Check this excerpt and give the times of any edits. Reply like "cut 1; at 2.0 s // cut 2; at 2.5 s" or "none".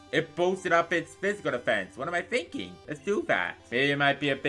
cut 1; at 2.8 s // cut 2; at 3.6 s